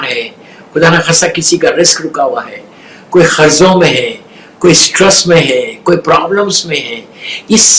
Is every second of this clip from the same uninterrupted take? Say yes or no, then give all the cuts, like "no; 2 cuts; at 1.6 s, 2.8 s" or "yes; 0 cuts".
yes; 0 cuts